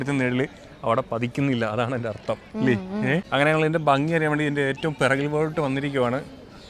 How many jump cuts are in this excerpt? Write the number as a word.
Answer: one